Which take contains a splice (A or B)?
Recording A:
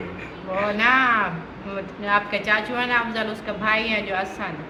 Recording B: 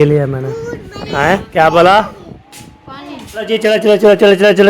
B